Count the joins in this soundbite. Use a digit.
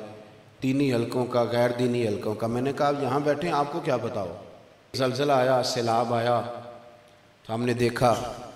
1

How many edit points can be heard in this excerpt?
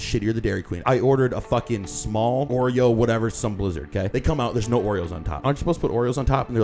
4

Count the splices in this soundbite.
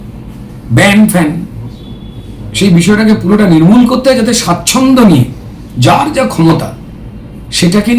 0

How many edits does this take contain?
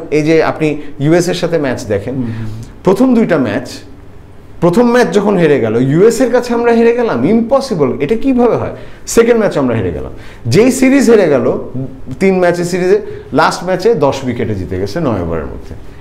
0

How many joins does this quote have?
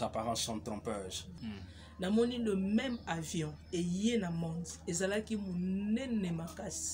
1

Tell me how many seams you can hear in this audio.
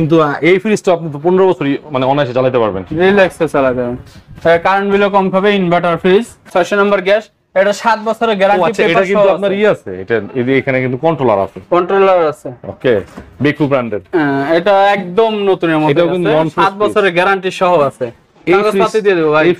1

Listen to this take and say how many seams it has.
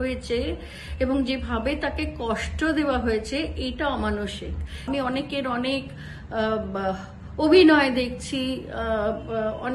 1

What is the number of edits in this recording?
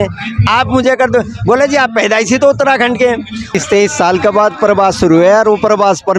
1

